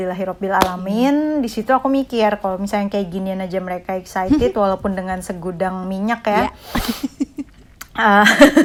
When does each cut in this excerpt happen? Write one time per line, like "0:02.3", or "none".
none